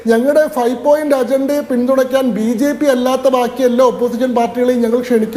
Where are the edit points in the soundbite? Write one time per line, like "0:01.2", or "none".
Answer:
none